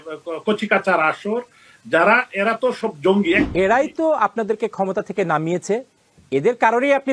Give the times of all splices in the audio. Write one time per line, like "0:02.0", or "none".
0:03.4